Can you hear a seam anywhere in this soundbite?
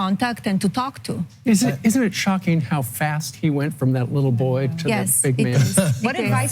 no; 0 cuts

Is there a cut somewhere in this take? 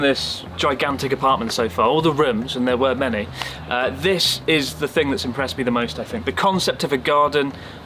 no; 0 cuts

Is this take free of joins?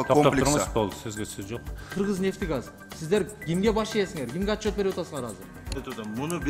no; 1 cut; at 1.9 s

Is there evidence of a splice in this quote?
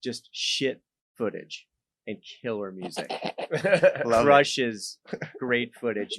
no; 0 cuts

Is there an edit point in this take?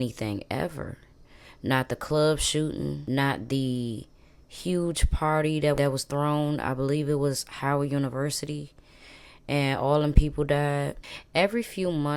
no; 0 cuts

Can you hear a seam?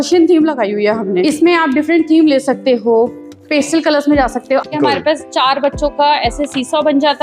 yes; 2 cuts; at 1.2 s, 4.7 s

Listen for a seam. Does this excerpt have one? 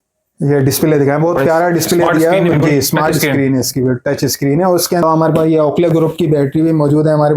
yes; 1 cut; at 5.0 s

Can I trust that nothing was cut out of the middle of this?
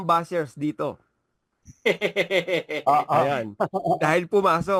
yes; 0 cuts

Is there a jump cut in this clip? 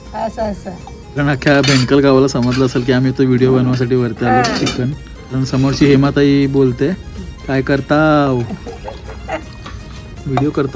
yes; 2 cuts; at 1.2 s, 5.3 s

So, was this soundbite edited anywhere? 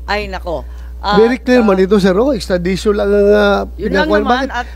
no; 0 cuts

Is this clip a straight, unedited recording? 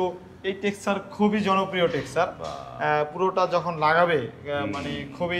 yes; 0 cuts

